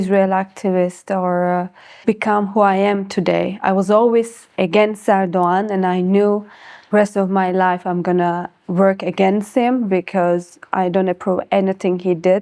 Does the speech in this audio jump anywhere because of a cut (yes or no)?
no